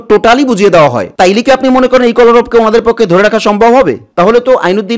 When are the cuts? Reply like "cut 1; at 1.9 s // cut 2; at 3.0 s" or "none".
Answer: cut 1; at 1.1 s // cut 2; at 4.1 s